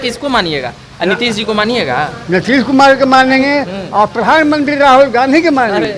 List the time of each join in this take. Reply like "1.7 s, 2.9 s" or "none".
3.4 s